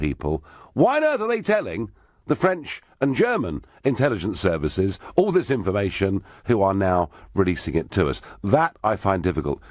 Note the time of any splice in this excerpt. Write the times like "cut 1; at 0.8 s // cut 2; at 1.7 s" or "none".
cut 1; at 5.9 s